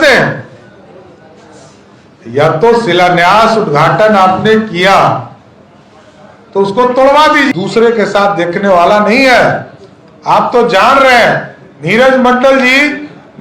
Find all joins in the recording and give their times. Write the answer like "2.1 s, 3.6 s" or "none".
7.5 s